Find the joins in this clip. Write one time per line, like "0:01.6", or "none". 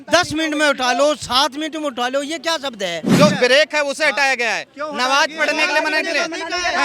0:03.1